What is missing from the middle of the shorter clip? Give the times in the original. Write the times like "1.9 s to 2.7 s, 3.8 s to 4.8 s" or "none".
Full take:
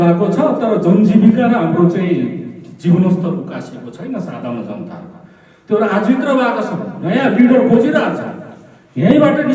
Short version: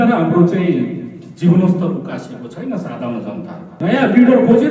5.1 s to 6.9 s